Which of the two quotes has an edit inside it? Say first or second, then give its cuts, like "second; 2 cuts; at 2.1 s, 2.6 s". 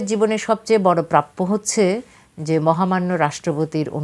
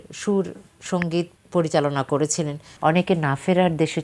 second; 2 cuts; at 0.9 s, 2.6 s